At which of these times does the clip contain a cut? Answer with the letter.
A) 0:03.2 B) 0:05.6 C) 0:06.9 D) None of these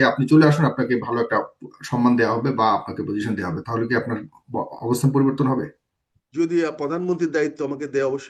D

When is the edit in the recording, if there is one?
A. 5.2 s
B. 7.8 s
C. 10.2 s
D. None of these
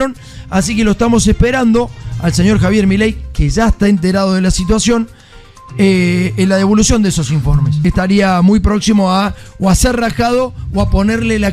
B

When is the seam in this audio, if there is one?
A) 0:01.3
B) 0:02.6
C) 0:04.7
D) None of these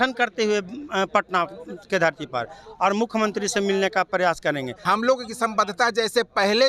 C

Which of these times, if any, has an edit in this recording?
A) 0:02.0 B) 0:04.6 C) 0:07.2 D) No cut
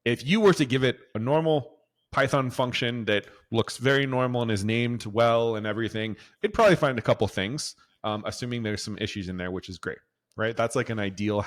D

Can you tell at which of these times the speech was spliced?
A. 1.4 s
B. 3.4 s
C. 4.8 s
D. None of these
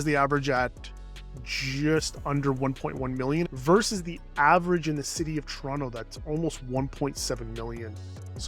B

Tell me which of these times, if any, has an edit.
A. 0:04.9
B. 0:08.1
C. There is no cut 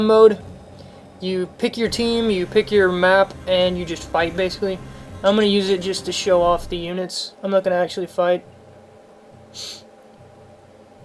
B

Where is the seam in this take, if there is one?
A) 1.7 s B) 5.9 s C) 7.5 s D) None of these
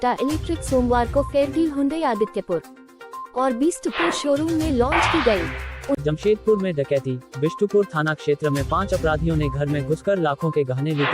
B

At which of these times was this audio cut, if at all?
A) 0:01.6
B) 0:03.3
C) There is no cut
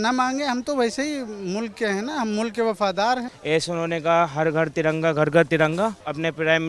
B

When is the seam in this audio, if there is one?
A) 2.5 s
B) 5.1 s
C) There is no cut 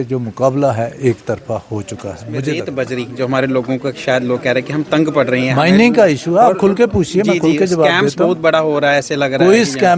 A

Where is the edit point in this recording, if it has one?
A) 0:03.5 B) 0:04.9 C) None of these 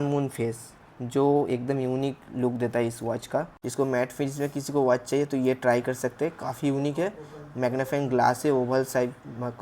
A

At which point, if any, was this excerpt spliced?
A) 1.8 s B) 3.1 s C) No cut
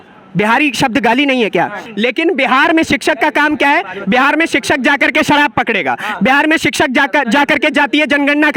A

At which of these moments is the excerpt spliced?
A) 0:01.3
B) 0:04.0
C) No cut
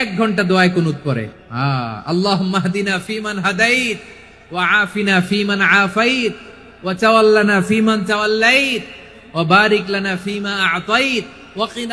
A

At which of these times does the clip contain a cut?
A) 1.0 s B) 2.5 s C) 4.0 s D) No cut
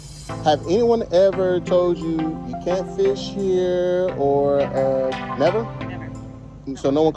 D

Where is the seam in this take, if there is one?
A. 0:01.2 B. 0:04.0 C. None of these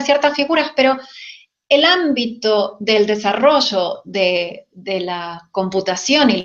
C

